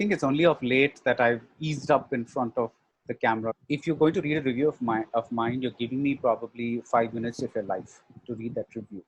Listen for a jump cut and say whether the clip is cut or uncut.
cut